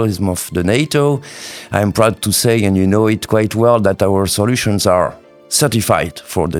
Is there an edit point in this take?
no; 0 cuts

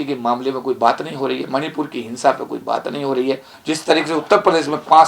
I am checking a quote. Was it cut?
yes; 1 cut; at 3.5 s

